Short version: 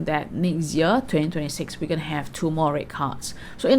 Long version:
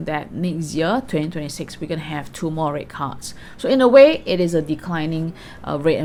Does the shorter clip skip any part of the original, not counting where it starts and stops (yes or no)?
no